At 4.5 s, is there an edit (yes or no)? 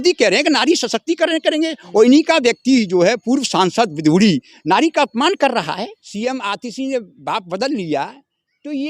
no